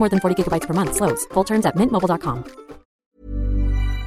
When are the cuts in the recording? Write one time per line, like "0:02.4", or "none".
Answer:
0:02.9